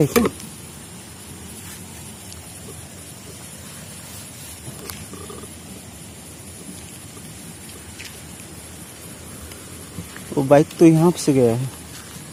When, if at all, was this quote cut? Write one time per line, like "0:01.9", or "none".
none